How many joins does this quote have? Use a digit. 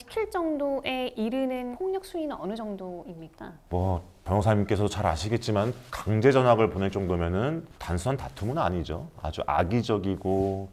0